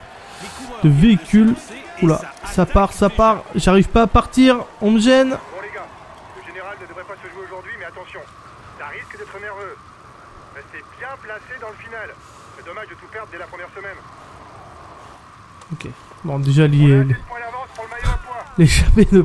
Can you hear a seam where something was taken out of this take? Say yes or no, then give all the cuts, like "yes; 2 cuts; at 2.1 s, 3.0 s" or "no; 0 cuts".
no; 0 cuts